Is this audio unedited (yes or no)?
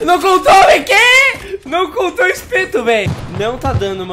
no